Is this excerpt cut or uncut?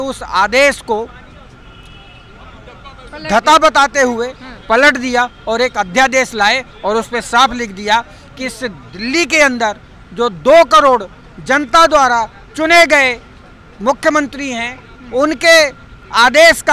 uncut